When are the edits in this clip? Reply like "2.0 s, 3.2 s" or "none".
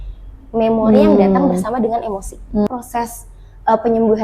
2.7 s